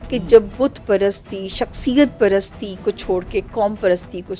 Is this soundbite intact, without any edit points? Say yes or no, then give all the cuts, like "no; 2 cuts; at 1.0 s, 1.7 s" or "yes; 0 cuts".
yes; 0 cuts